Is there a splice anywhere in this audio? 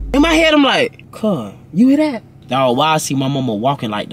yes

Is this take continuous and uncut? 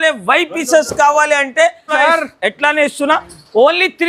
no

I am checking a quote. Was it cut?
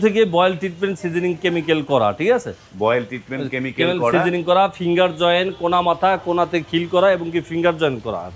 no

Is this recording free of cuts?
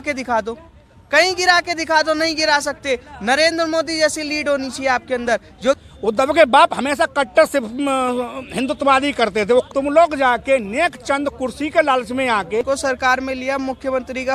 no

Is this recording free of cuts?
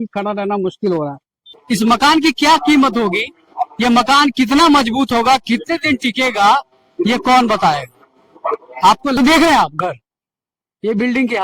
no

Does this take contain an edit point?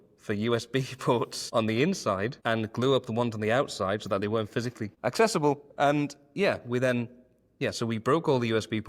yes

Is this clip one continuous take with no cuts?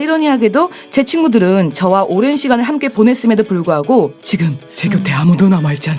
yes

